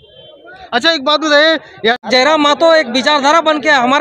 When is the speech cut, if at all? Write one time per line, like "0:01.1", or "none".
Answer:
0:02.0